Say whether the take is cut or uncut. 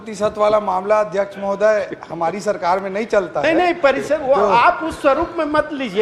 uncut